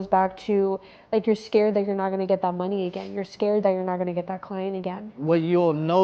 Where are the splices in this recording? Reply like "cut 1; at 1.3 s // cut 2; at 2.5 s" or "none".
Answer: cut 1; at 5.1 s